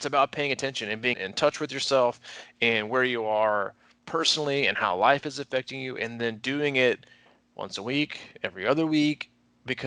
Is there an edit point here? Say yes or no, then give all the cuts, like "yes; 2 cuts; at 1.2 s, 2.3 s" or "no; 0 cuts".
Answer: yes; 1 cut; at 1.2 s